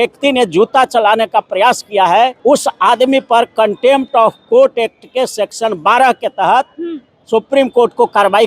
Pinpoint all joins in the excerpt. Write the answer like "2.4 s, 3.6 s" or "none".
2.4 s

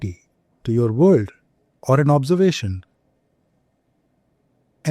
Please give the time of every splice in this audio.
none

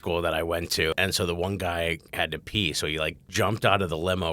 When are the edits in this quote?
0.9 s, 3.2 s

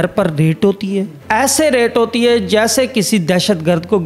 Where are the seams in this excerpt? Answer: 1.2 s

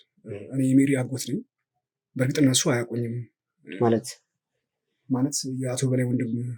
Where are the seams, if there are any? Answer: none

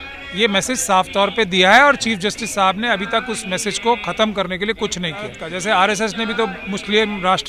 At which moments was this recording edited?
5.5 s

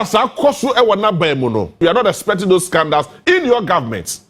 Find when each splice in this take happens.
1.7 s

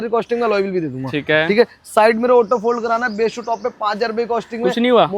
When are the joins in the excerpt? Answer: none

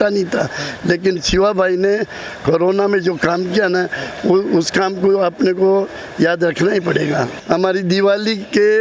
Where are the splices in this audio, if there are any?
7.4 s

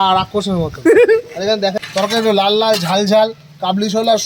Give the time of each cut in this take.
1.8 s

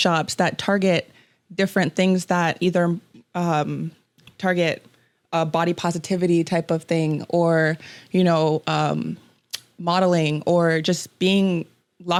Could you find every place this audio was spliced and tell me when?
none

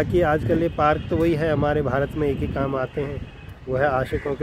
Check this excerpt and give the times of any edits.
none

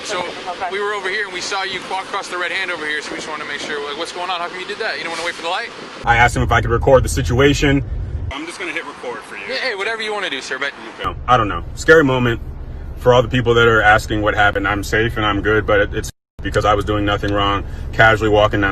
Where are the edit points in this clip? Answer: 6.0 s, 11.1 s

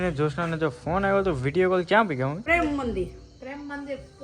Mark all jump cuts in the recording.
2.4 s

